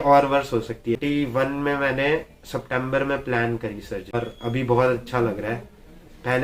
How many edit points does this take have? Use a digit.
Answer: 2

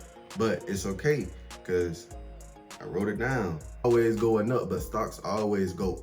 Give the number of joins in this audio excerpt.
1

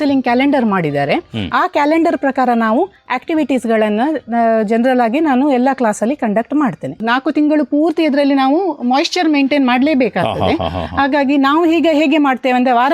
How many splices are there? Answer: 1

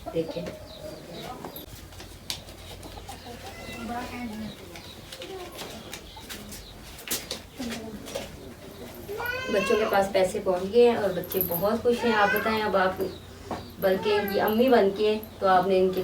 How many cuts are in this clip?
1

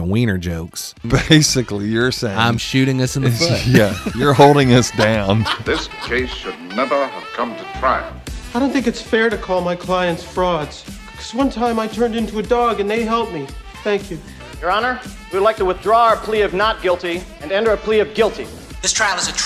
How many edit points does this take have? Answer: 2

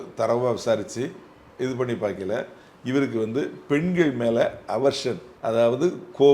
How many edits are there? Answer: 1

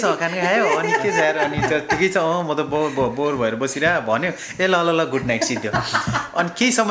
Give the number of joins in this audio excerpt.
0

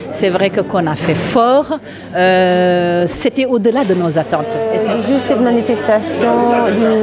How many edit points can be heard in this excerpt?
1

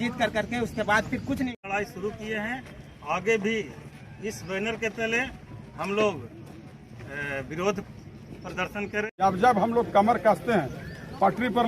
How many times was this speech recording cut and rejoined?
2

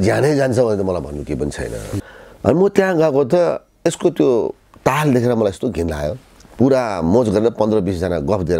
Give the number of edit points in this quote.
1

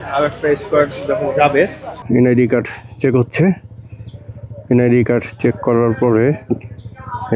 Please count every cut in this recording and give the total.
1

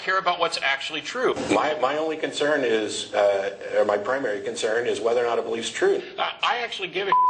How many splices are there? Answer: 2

